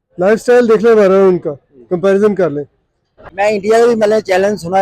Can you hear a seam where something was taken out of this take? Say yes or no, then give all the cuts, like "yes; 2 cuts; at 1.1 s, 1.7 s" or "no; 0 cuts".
yes; 1 cut; at 3.2 s